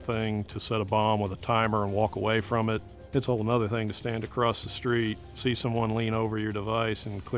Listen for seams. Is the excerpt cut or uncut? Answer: cut